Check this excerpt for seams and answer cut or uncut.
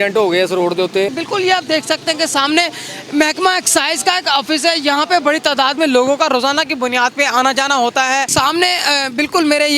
cut